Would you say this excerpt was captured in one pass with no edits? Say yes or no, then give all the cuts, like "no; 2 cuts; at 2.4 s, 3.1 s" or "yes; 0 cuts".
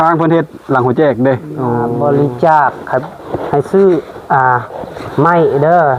no; 1 cut; at 1.9 s